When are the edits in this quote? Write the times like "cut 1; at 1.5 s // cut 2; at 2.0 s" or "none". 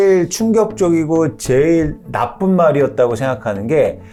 none